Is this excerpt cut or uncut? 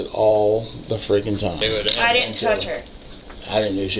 cut